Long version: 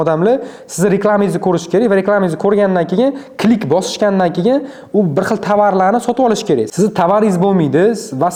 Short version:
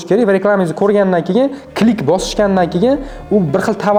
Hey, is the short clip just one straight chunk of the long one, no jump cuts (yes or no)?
yes